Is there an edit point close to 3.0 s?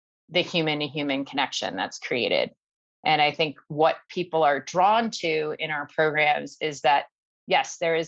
no; 0 cuts

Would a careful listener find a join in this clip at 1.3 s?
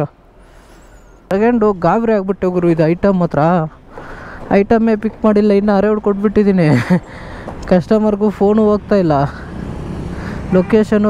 yes; 1 cut; at 1.3 s

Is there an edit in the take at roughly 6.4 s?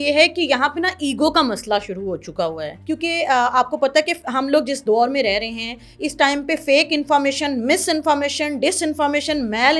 no; 2 cuts; at 2.7 s, 4.8 s

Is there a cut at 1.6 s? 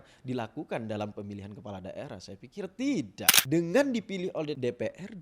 no; 1 cut; at 3.3 s

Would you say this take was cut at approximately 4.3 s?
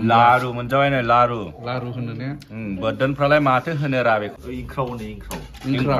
yes; 1 cut; at 4.3 s

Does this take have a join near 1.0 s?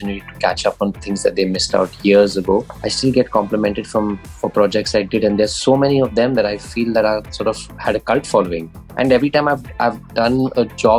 no; 3 cuts; at 2.8 s, 7.7 s, 8.8 s

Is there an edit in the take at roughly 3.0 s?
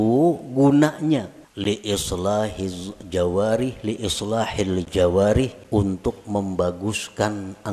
no; 2 cuts; at 1.4 s, 5.6 s

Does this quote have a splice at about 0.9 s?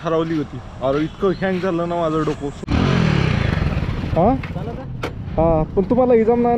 no; 1 cut; at 2.7 s

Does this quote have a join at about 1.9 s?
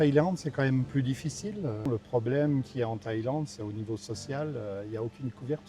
yes; 1 cut; at 1.9 s

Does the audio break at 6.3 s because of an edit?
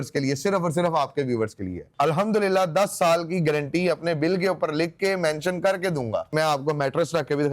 yes; 2 cuts; at 1.8 s, 6.3 s

